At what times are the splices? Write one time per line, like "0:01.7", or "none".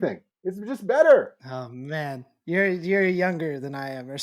none